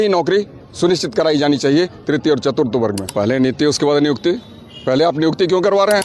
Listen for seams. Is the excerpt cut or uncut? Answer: cut